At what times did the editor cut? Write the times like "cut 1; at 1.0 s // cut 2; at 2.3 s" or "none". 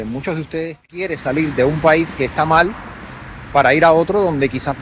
cut 1; at 1.2 s

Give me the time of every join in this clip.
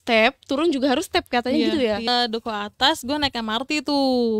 cut 1; at 2.1 s

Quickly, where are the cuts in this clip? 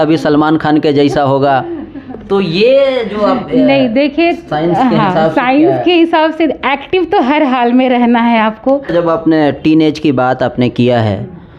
cut 1; at 8.9 s

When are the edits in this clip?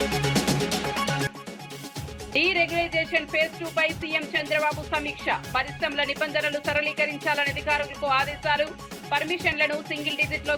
cut 1; at 1.2 s

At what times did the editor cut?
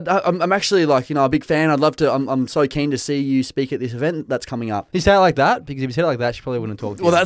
cut 1; at 4.9 s

